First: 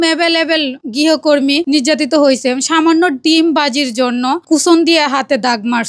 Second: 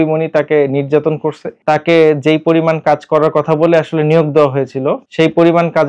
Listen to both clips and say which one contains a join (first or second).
second